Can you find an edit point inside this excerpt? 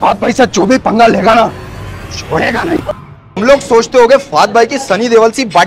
no; 0 cuts

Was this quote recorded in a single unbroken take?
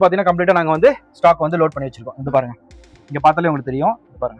yes; 0 cuts

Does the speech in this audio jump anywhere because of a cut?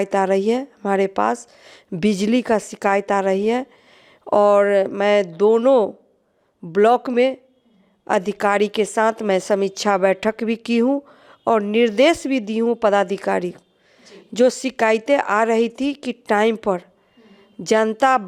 no; 0 cuts

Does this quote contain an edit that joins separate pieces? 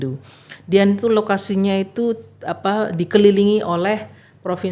no; 0 cuts

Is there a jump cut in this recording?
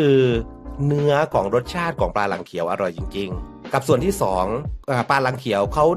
yes; 2 cuts; at 3.6 s, 4.7 s

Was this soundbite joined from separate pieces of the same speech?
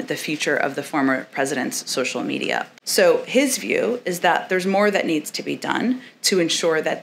yes; 1 cut; at 2.7 s

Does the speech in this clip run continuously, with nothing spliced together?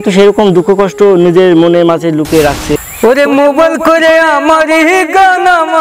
no; 1 cut; at 2.8 s

